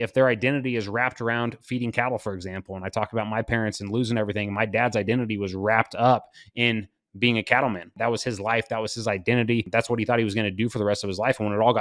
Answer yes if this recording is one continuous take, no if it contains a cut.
no